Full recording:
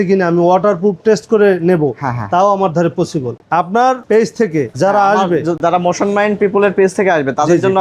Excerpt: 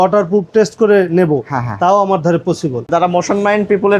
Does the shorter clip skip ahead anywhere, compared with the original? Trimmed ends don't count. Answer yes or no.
yes